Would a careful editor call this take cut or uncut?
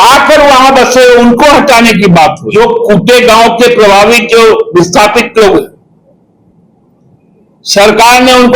cut